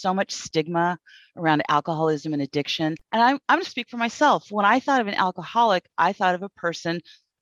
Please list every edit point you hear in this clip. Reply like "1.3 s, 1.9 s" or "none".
3.0 s